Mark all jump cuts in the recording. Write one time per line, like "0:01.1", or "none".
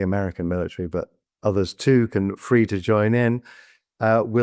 0:01.2